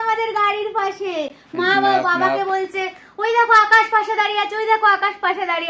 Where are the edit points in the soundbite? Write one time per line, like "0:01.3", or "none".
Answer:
none